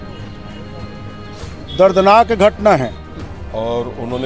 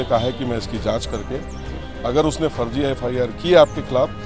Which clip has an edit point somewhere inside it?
first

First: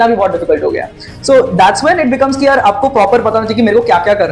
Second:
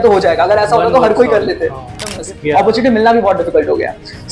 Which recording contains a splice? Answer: second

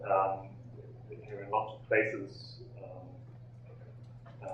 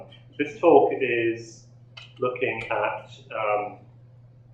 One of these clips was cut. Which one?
first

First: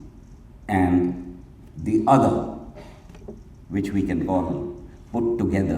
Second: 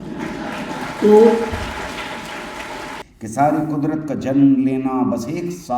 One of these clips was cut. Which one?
second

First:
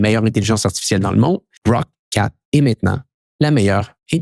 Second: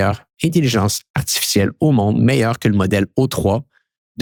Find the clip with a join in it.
first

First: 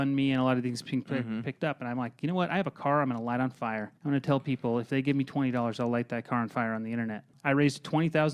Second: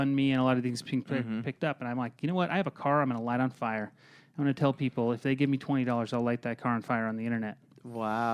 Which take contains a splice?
first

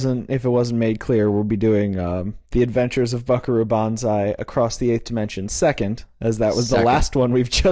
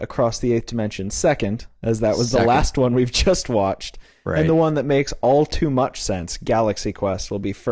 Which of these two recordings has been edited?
second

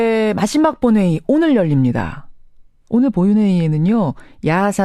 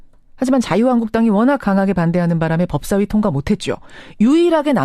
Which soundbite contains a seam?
second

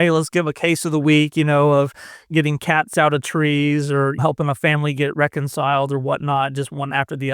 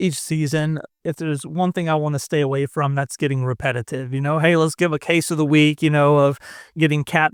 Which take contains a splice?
first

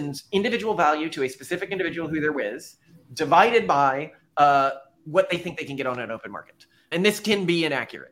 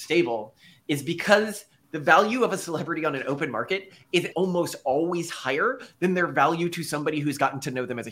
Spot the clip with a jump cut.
second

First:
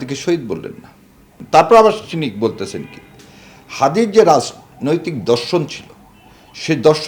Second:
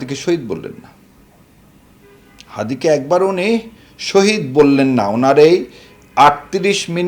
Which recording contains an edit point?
first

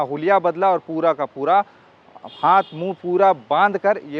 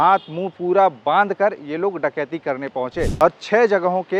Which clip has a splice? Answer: second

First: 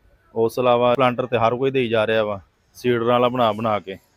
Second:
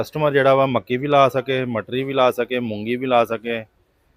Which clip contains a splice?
first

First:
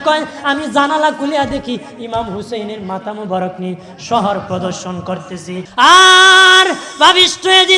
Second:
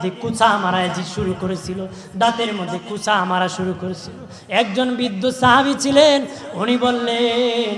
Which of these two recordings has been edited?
first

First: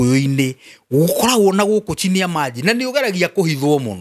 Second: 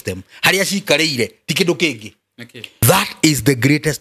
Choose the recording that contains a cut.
second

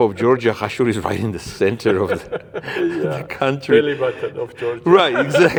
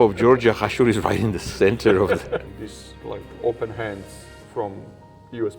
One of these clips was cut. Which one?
second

